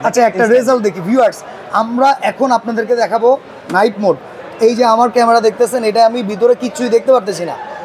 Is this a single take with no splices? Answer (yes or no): yes